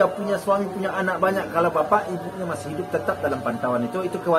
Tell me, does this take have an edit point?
no; 0 cuts

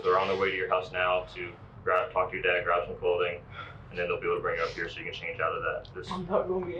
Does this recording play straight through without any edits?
yes; 0 cuts

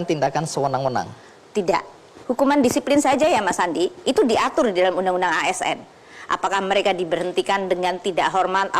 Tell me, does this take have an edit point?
yes; 1 cut; at 2.1 s

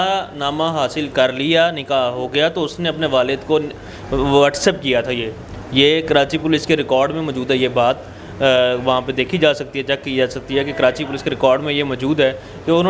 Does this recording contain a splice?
no; 0 cuts

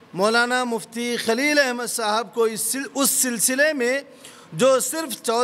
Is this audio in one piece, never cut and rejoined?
yes; 0 cuts

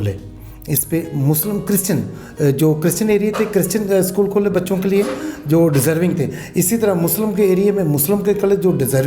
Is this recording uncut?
yes; 0 cuts

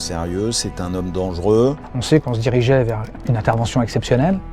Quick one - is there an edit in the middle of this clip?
yes; 2 cuts; at 2.2 s, 3.1 s

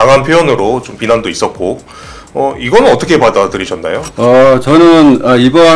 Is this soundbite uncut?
no; 1 cut; at 4.0 s

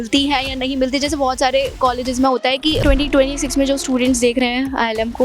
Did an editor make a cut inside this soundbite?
yes; 1 cut; at 2.8 s

